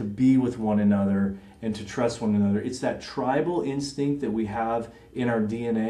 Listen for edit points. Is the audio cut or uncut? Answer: uncut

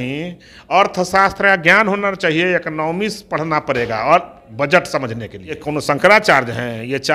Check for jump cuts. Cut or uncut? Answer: cut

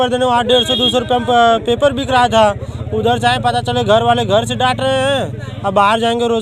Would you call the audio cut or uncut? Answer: uncut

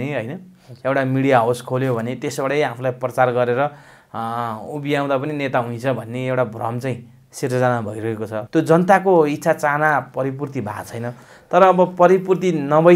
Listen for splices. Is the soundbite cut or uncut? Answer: cut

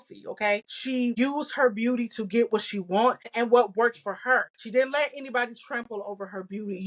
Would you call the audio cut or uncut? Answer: cut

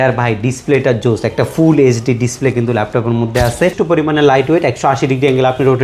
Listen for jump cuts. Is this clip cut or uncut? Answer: cut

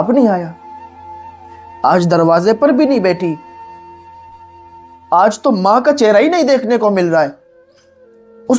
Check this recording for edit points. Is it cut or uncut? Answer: uncut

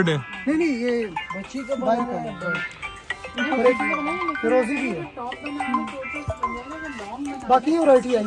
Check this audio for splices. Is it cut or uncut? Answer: uncut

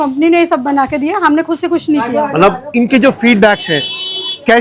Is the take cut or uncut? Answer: cut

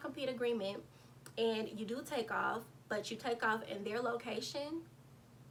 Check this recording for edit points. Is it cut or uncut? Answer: uncut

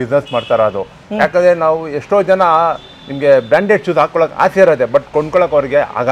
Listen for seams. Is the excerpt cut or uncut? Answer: uncut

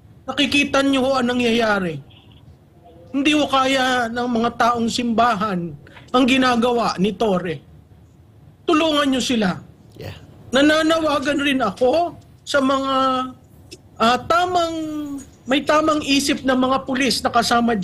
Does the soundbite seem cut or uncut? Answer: uncut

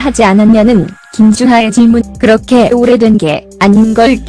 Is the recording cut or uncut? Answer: uncut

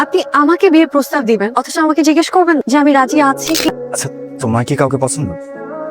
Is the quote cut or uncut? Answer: cut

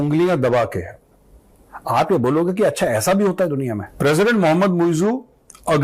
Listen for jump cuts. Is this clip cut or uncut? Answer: cut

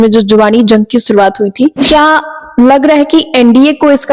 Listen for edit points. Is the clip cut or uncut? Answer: uncut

